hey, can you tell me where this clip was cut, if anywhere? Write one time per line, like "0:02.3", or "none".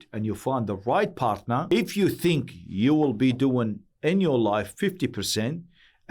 0:01.7